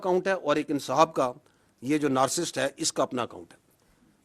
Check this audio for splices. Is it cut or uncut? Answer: uncut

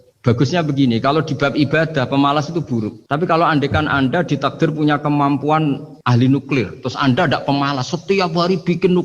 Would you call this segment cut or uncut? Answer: cut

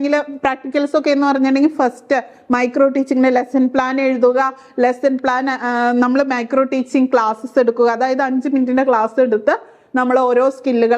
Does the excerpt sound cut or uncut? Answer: uncut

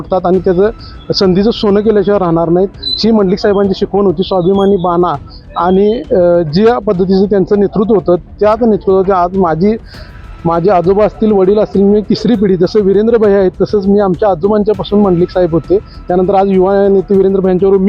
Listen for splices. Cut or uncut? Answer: uncut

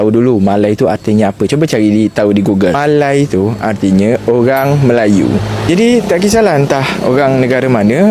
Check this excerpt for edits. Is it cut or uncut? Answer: uncut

